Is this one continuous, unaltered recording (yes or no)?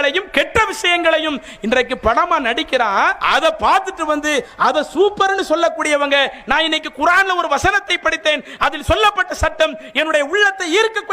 no